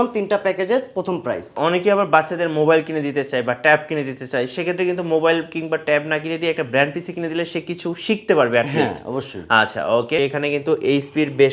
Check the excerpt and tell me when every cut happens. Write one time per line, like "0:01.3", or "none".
0:01.6
0:10.2